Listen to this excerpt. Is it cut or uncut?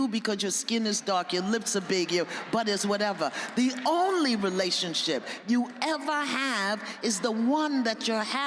uncut